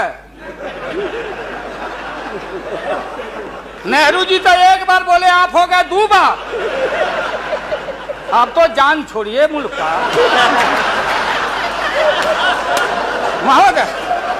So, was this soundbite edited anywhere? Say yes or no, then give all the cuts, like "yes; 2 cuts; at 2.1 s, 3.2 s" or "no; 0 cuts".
no; 0 cuts